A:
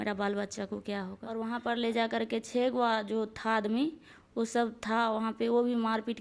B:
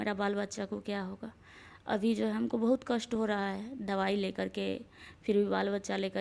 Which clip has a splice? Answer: A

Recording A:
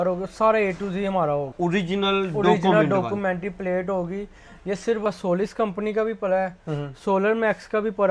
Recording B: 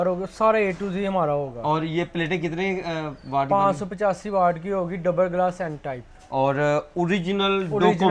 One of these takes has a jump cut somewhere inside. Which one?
A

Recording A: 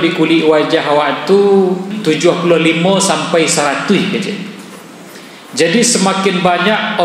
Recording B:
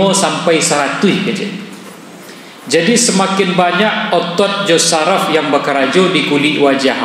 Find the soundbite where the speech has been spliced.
A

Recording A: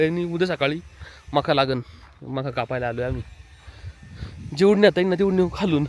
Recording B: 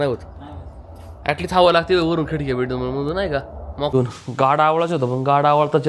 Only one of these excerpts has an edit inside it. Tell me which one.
B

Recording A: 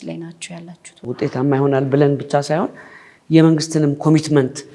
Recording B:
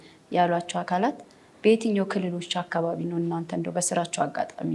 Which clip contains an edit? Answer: A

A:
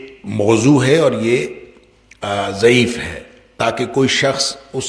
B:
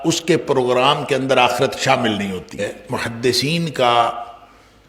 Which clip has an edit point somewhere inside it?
B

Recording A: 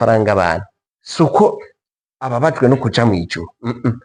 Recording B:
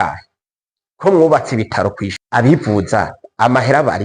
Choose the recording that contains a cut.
B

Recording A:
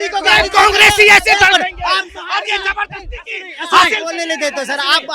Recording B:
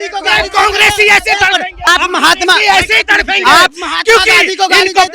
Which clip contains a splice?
B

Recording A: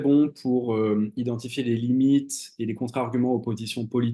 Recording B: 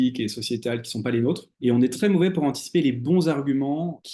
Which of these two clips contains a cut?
B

